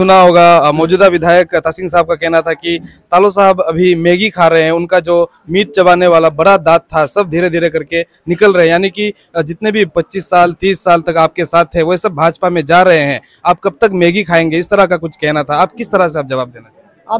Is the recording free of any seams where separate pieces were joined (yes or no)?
yes